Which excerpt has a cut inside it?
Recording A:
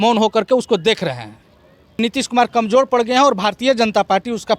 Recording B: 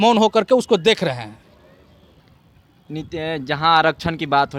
A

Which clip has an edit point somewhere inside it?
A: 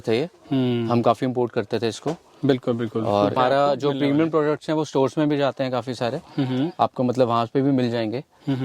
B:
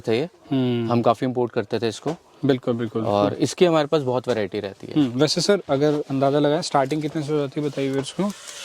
A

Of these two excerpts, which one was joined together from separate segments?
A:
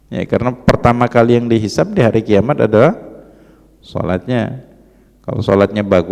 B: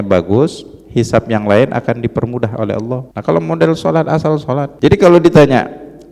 B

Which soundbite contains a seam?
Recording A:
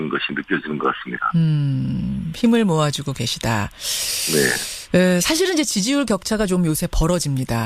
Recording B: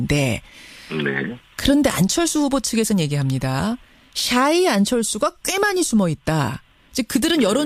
A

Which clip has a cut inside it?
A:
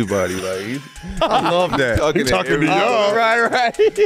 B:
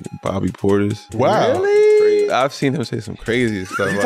B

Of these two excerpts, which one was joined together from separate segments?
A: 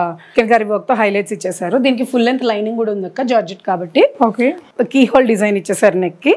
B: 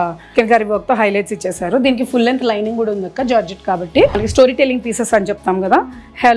B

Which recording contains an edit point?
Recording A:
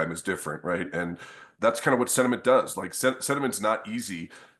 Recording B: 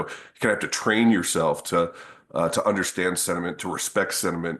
A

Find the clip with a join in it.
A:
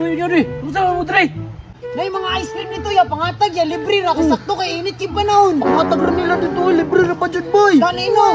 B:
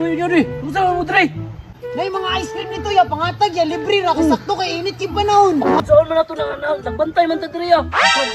B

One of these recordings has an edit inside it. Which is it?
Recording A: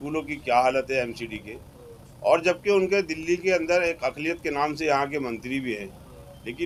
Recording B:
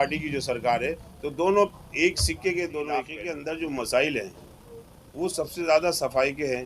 B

